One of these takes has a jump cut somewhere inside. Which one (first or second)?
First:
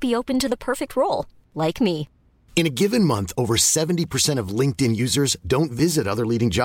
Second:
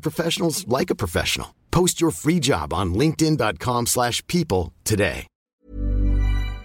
second